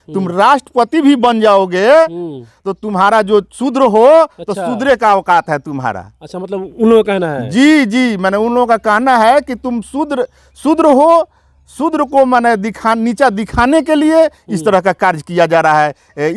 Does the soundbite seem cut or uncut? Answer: uncut